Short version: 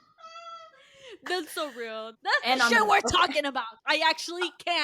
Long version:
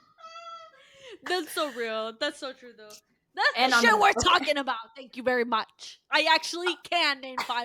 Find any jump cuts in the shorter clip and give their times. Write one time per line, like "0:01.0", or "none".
0:02.1
0:03.7